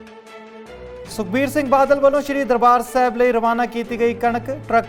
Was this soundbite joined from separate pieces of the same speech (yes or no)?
yes